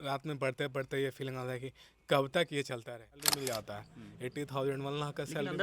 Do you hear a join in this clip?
yes; 1 cut; at 3.3 s

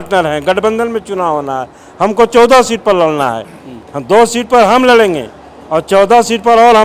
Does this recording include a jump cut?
no; 0 cuts

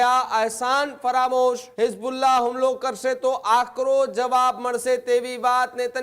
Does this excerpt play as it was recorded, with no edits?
no; 1 cut; at 1.7 s

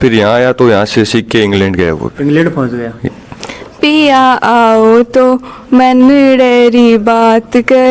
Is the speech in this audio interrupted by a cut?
yes; 1 cut; at 3.0 s

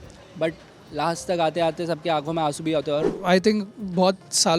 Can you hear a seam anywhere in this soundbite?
yes; 1 cut; at 3.1 s

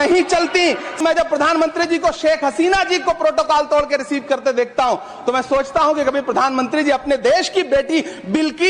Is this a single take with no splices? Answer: no; 1 cut; at 1.0 s

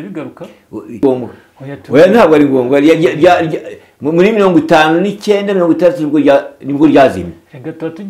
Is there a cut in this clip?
yes; 1 cut; at 1.0 s

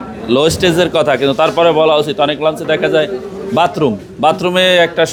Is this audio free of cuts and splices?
yes; 0 cuts

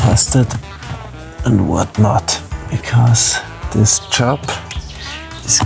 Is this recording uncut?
no; 2 cuts; at 2.5 s, 3.6 s

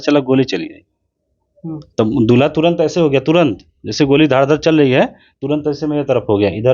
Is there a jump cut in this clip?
no; 0 cuts

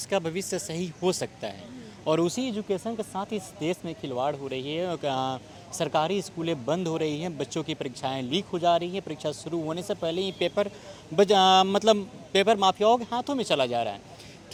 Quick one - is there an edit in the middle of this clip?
no; 0 cuts

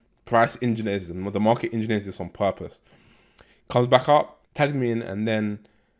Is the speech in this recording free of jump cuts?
no; 1 cut; at 4.4 s

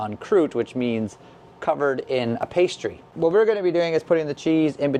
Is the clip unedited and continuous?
yes; 0 cuts

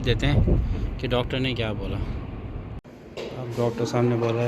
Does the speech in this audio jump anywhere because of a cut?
yes; 1 cut; at 2.6 s

